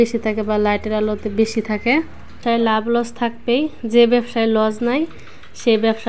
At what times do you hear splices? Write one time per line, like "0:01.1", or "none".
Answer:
0:02.4